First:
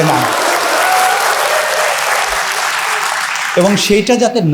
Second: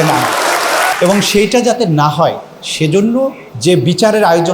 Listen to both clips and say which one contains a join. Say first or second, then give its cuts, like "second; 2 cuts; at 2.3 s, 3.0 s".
second; 2 cuts; at 0.9 s, 3.5 s